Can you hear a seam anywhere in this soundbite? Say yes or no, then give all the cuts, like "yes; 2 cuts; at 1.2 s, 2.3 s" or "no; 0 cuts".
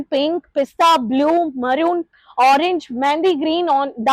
no; 0 cuts